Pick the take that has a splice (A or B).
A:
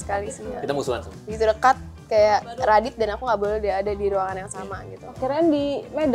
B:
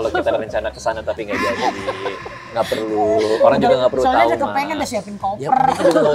A